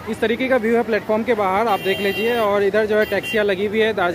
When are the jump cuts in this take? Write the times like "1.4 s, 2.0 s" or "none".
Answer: none